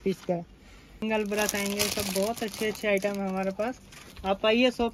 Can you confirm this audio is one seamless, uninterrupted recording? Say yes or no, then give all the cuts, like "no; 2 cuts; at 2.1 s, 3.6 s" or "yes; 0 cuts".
no; 1 cut; at 1.0 s